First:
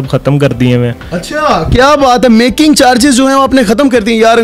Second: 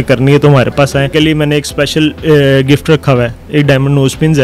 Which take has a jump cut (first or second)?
second